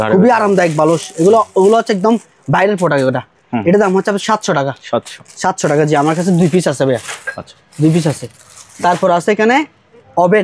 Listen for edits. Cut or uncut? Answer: uncut